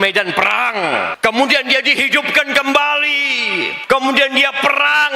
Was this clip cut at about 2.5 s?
no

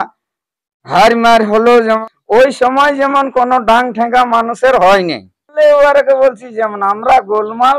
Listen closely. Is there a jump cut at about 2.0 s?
yes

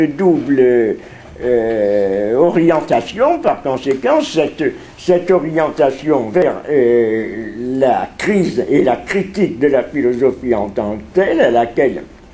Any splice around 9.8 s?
yes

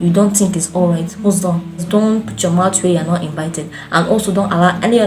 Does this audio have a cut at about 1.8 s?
yes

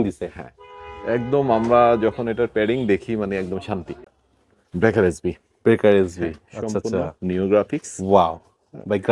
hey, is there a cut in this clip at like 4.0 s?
yes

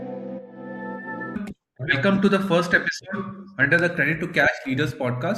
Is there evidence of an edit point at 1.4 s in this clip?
yes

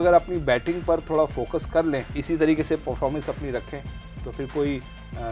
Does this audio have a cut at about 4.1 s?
no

